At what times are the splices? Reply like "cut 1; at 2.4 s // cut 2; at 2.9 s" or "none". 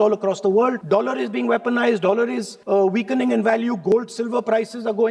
cut 1; at 0.8 s // cut 2; at 2.5 s